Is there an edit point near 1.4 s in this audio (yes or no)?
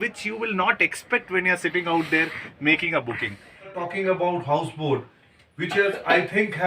no